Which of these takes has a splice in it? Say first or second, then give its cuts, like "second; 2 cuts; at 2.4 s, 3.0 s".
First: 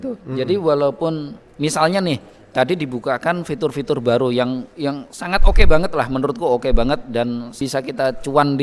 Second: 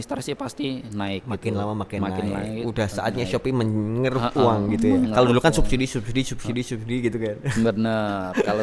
first; 1 cut; at 7.6 s